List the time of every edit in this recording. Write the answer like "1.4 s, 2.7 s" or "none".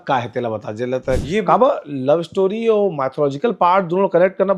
1.2 s